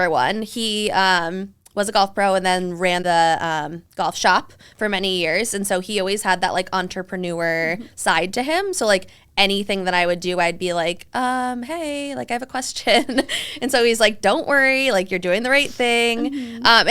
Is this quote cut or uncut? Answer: cut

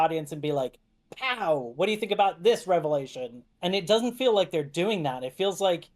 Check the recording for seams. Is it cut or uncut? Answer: uncut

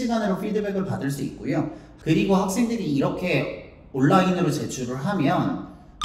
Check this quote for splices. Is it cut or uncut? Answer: cut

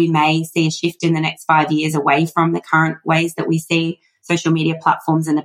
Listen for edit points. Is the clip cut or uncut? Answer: uncut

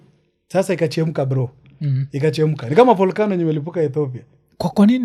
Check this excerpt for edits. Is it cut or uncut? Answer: uncut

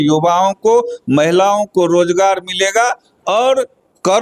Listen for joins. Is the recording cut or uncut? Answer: uncut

